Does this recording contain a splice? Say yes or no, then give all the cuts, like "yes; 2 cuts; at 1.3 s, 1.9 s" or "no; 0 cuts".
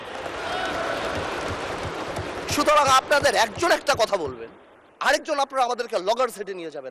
no; 0 cuts